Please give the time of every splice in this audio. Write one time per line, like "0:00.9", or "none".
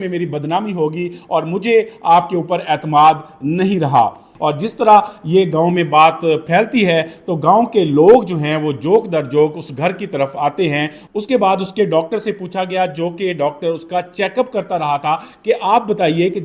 0:04.3
0:11.0